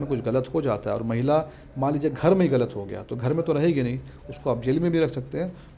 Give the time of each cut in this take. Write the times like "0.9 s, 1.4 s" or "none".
none